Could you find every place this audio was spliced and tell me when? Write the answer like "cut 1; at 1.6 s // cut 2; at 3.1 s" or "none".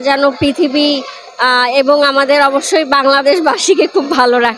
none